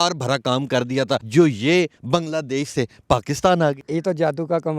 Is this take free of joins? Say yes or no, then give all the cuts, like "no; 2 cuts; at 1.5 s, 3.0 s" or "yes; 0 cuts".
no; 3 cuts; at 1.2 s, 2.0 s, 3.8 s